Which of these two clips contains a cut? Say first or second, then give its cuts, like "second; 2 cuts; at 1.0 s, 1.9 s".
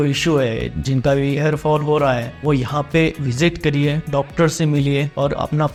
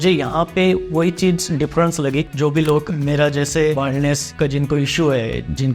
second; 1 cut; at 2.3 s